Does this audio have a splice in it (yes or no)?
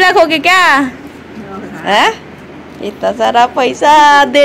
no